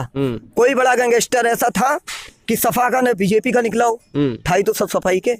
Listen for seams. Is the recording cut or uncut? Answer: uncut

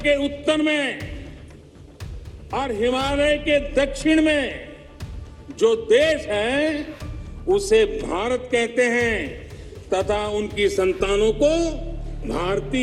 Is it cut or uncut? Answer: uncut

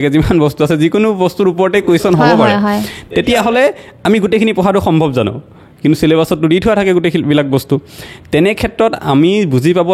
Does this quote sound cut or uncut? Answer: uncut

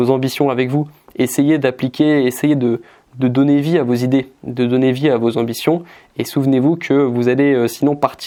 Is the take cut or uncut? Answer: uncut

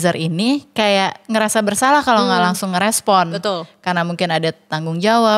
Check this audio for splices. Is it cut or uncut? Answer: uncut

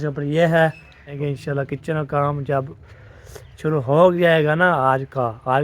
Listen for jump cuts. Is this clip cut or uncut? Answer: cut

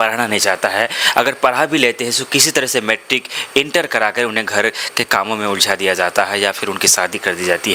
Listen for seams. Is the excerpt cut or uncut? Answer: uncut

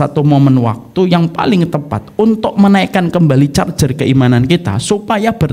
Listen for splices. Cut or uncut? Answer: uncut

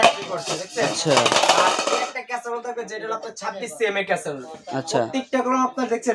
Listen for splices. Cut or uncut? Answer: uncut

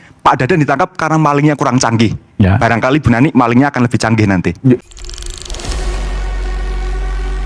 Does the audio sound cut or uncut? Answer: cut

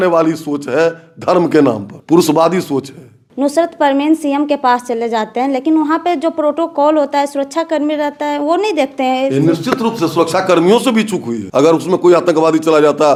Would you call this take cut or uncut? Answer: uncut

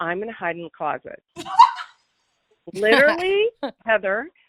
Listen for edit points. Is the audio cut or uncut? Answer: uncut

